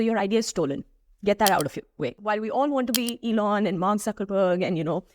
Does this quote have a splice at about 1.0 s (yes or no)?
no